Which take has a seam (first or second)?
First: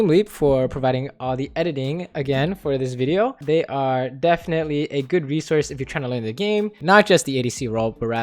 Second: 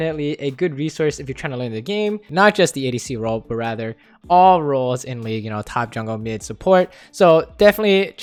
first